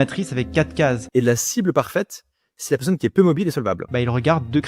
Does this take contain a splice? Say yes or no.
yes